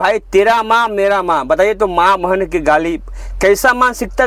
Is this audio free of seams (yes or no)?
yes